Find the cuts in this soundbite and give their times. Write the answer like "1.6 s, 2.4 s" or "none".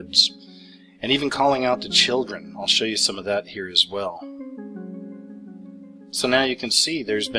1.9 s

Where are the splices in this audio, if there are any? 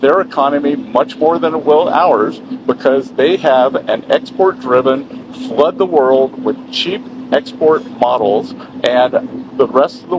none

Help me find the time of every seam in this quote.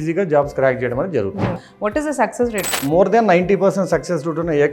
1.6 s, 2.8 s

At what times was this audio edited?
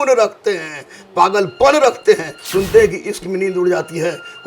2.4 s

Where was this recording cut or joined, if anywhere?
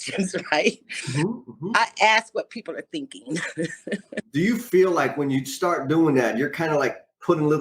4.2 s

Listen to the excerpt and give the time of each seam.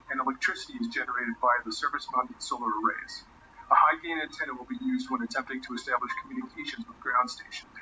none

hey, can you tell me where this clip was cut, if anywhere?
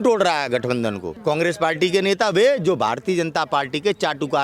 1.1 s

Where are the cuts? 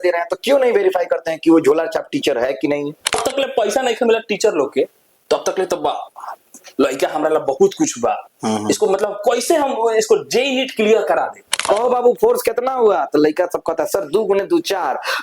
3.1 s, 11.5 s

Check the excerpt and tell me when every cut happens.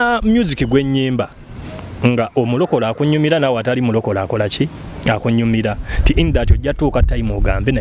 none

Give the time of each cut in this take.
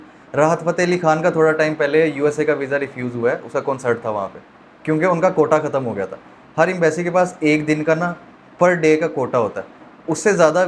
none

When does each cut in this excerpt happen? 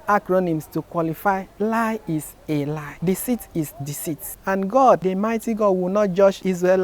4.3 s, 5.0 s

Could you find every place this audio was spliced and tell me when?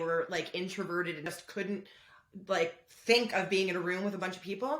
1.3 s

